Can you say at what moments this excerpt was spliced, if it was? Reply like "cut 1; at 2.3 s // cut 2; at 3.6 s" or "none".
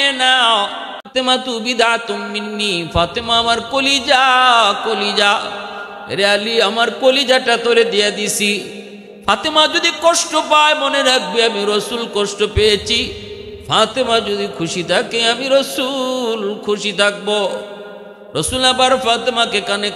cut 1; at 1.1 s